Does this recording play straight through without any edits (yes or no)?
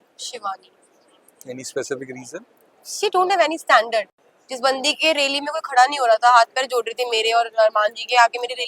no